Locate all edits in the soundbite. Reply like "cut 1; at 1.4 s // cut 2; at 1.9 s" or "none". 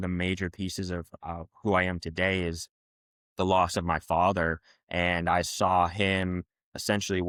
none